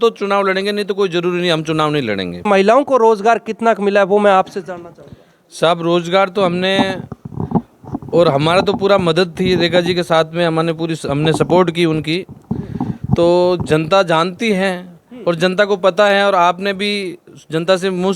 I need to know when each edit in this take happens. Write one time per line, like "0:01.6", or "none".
0:02.5